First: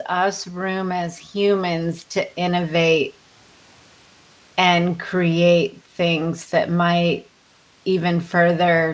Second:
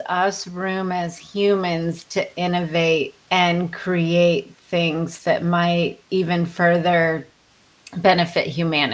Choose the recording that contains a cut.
second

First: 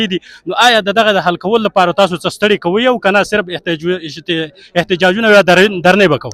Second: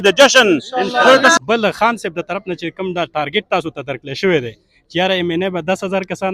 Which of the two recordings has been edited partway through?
second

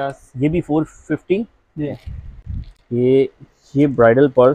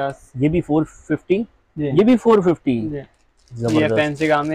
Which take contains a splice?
first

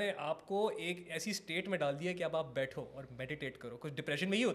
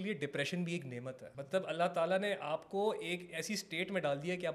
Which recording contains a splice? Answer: second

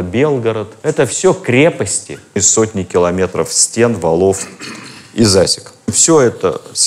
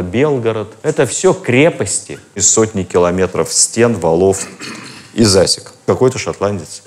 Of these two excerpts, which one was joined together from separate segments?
second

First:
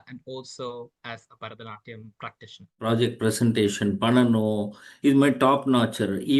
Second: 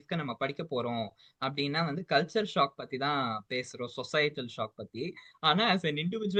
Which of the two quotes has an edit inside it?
first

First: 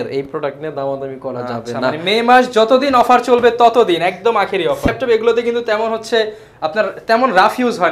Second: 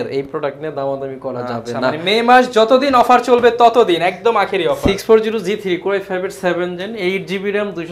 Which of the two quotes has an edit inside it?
first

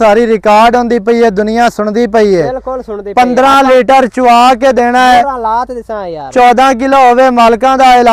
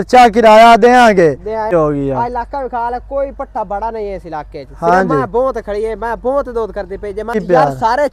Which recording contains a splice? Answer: second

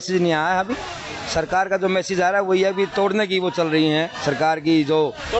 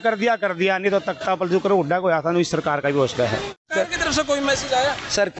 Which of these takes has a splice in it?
second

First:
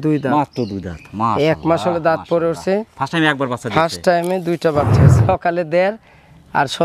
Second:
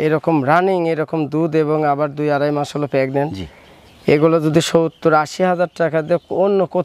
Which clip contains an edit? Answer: first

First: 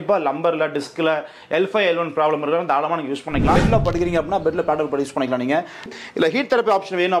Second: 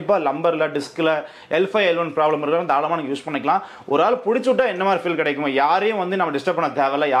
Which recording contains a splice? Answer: first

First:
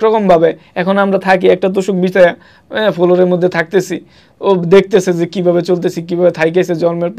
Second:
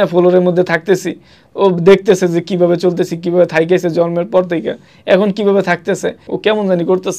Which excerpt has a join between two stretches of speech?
second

